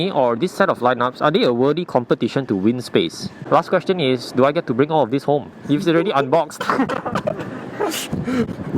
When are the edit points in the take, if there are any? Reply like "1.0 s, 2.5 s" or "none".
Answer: 3.4 s